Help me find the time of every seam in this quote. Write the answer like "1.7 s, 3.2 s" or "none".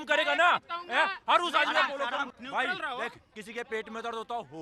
2.3 s